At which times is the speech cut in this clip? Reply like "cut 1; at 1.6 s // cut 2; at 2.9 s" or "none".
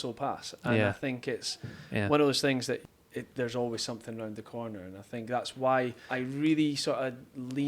cut 1; at 6.0 s